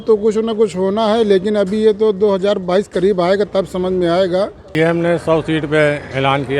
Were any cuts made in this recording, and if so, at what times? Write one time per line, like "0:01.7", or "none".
0:04.7